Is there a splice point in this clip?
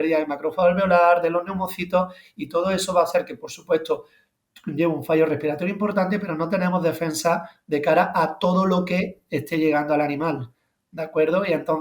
no; 0 cuts

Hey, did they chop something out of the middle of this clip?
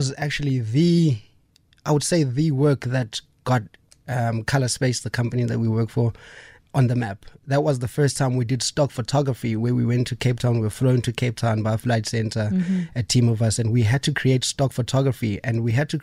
no; 0 cuts

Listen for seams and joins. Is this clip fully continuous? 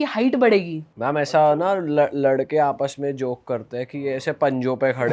yes; 0 cuts

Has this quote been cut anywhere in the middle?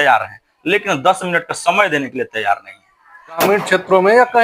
yes; 1 cut; at 3.4 s

